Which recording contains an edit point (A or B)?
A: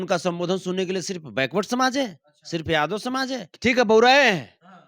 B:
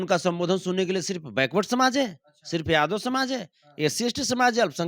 A